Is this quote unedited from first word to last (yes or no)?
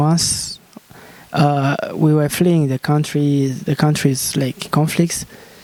yes